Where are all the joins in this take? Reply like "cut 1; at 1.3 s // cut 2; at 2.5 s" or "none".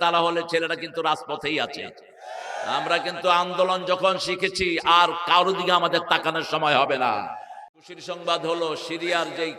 cut 1; at 7.6 s